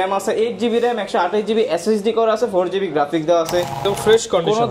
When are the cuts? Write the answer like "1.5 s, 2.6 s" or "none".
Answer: 3.8 s